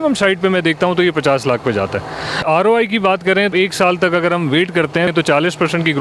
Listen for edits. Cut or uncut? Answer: cut